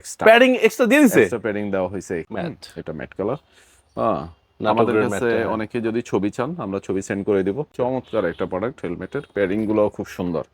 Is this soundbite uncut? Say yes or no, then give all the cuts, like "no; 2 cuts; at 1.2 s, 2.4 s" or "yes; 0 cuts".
no; 2 cuts; at 2.2 s, 7.7 s